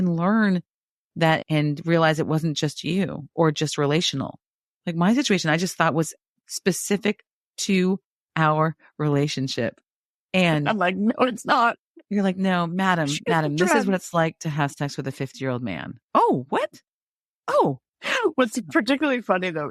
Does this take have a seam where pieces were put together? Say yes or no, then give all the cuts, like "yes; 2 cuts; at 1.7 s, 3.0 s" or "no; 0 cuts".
yes; 1 cut; at 1.4 s